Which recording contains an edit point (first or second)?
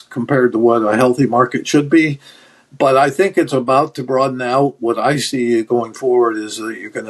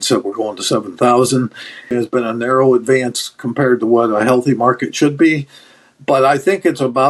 second